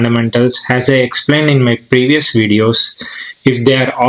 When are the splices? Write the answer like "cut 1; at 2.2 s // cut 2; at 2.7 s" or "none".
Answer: none